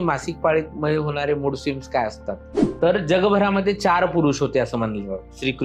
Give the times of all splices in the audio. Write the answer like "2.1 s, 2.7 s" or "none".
2.7 s